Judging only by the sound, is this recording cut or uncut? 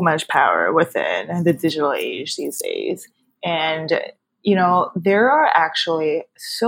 uncut